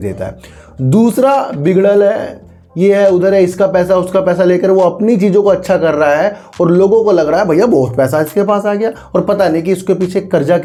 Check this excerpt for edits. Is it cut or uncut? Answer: uncut